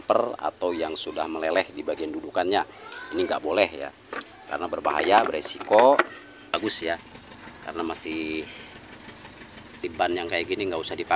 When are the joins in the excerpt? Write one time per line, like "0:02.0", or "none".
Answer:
0:06.5
0:09.8